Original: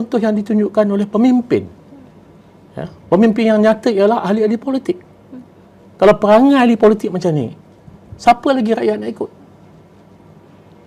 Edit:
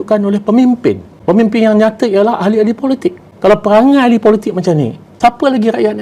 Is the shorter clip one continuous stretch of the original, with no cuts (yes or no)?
no